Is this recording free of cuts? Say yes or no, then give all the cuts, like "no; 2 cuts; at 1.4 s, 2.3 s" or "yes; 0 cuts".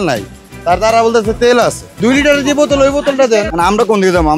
no; 2 cuts; at 1.9 s, 3.5 s